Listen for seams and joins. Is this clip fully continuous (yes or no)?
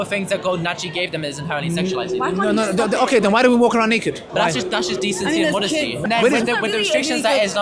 no